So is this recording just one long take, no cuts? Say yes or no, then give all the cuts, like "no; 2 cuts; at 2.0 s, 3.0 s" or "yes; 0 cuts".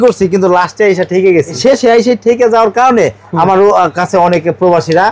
no; 1 cut; at 1.5 s